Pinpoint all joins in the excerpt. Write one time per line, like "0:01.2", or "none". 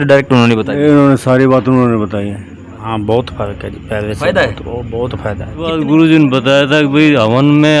0:02.9
0:05.5